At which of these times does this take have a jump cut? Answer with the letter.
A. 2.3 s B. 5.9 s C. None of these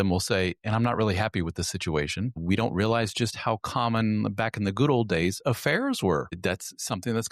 A